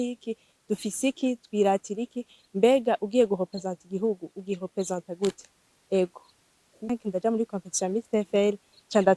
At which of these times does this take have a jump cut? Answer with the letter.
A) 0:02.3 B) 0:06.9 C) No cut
B